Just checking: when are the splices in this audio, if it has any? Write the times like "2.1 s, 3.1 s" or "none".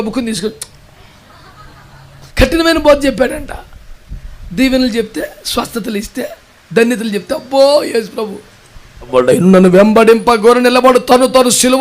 2.3 s, 9.1 s

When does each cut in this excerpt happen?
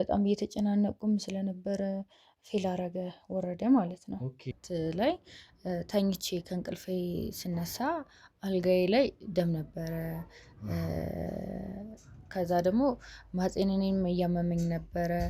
4.6 s

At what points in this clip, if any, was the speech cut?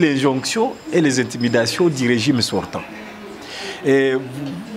none

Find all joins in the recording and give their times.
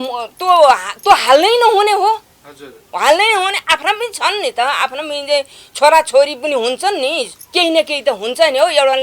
7.4 s

